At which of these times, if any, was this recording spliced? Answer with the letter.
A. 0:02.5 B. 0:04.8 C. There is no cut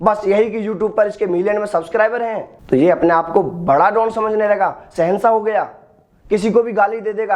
A